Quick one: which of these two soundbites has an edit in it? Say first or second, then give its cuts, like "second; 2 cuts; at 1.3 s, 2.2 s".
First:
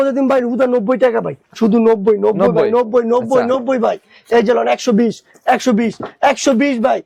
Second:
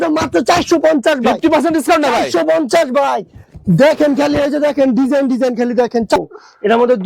second; 1 cut; at 6.2 s